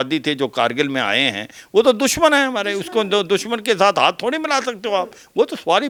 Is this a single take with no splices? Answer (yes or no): yes